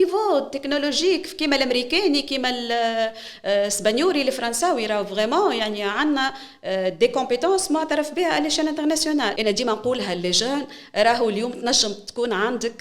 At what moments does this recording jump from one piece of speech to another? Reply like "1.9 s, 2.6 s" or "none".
9.4 s